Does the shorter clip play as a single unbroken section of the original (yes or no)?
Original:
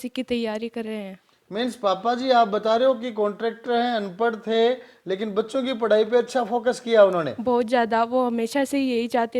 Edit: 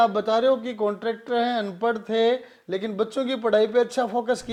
yes